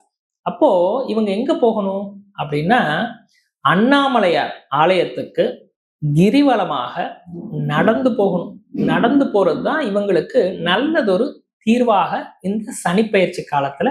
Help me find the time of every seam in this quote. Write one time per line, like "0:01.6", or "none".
none

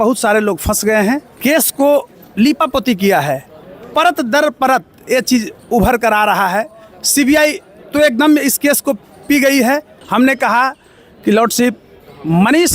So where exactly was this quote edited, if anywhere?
0:01.3
0:10.0

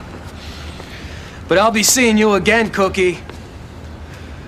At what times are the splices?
none

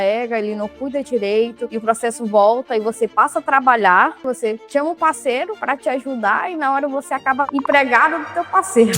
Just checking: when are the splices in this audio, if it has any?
0:04.2

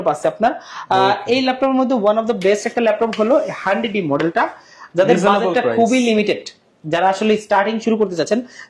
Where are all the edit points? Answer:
none

